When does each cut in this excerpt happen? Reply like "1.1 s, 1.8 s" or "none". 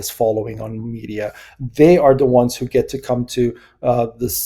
none